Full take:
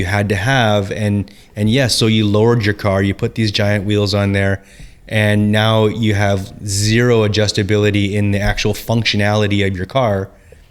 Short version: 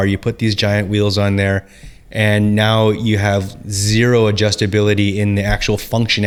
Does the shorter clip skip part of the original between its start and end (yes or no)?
no